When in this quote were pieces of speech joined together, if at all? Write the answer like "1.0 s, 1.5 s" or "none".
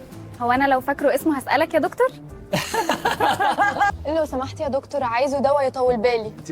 3.9 s